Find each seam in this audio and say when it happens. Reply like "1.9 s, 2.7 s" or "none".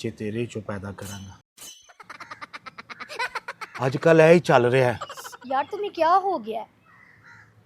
none